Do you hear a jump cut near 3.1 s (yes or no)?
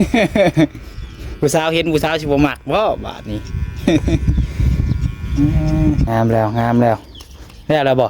no